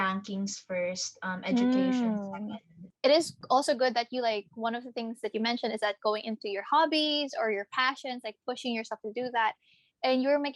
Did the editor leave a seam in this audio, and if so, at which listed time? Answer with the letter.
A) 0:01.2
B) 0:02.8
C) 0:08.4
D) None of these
B